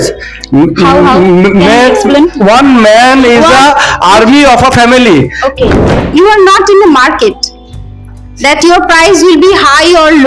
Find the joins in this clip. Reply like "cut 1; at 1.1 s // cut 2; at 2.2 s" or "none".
cut 1; at 6.0 s